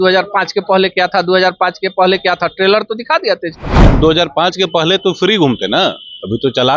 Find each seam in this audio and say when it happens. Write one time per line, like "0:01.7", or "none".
0:03.8